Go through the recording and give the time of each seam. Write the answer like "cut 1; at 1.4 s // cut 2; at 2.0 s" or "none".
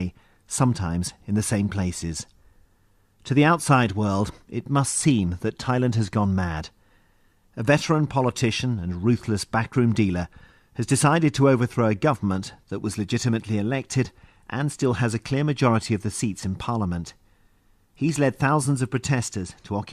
cut 1; at 17.9 s